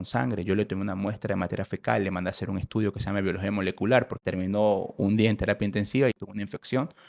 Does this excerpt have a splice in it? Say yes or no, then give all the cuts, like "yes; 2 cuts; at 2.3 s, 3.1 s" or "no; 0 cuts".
yes; 2 cuts; at 4.2 s, 6.2 s